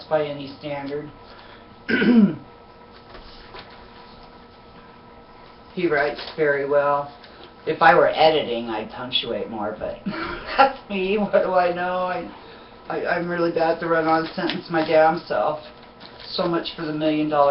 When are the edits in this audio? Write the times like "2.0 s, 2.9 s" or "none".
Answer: 9.6 s